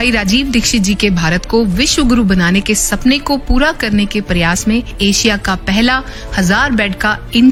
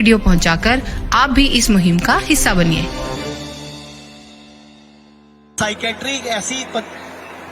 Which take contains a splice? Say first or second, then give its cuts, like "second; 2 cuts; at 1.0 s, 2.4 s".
second; 1 cut; at 5.5 s